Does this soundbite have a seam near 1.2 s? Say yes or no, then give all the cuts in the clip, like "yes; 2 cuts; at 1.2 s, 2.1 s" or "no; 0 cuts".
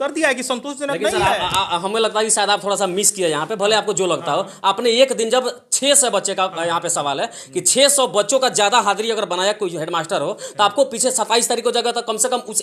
no; 0 cuts